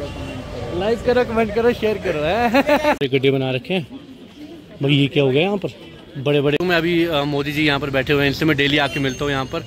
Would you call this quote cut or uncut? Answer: cut